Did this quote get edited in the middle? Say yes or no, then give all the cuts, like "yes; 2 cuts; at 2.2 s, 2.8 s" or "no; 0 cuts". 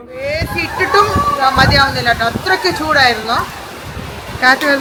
no; 0 cuts